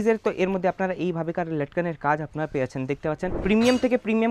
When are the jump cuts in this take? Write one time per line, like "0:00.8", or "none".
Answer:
0:03.4